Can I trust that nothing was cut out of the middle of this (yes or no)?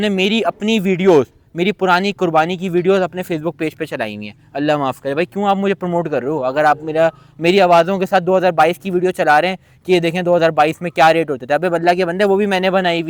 yes